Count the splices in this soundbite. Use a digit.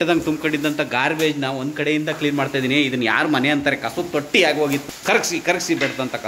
1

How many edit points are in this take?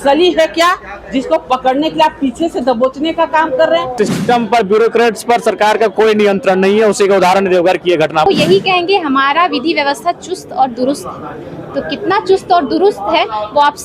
2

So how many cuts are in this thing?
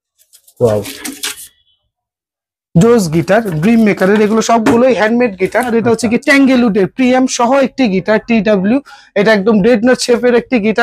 1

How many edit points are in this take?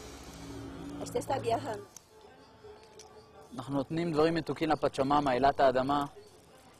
1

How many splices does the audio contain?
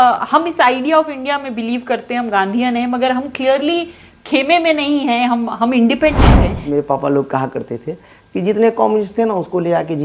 1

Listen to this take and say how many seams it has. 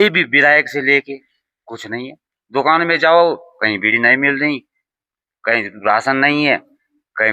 0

